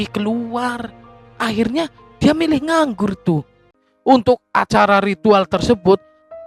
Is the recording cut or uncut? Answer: cut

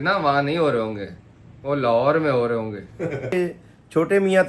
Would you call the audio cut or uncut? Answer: cut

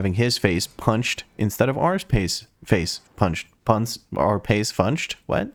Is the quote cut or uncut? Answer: uncut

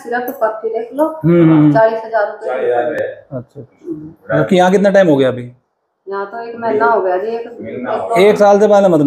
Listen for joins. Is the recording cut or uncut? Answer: uncut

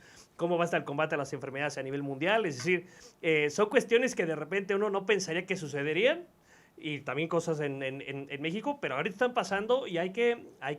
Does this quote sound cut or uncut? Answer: uncut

